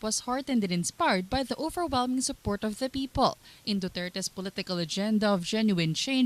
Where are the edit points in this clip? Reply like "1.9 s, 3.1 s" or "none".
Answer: 1.5 s